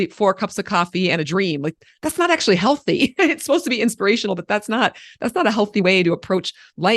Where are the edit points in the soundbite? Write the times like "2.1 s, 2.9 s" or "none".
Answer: none

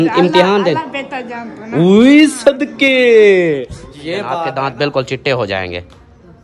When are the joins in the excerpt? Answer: 4.4 s

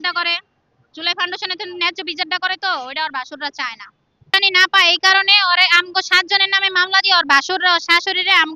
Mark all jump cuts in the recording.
4.3 s

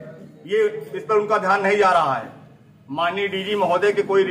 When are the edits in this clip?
none

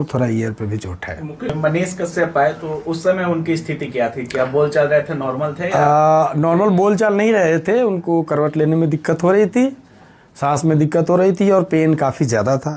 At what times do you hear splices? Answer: 1.5 s

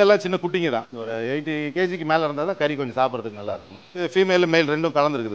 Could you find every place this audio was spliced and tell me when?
1.0 s, 4.0 s

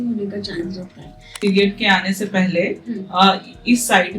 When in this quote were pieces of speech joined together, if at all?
1.4 s

